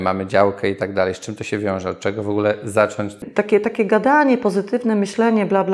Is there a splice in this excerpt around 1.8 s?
no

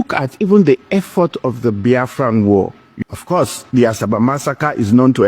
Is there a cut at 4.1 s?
no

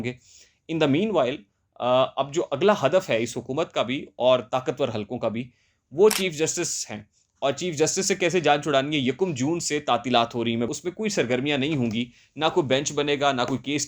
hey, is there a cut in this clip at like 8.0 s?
no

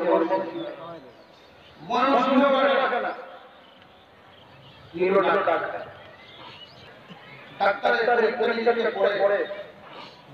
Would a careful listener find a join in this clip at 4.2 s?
no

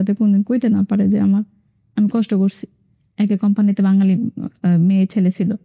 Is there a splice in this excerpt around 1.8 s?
no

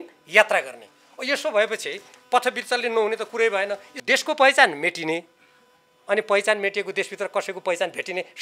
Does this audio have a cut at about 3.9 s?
yes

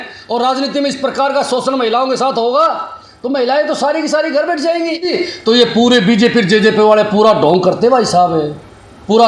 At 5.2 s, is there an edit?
yes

